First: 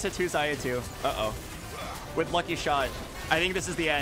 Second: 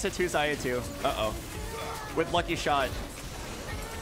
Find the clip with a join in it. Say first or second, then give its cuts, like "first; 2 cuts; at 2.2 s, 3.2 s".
first; 1 cut; at 3.1 s